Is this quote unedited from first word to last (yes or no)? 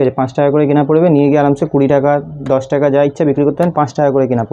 yes